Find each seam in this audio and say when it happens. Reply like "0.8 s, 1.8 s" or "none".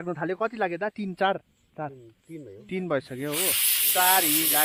none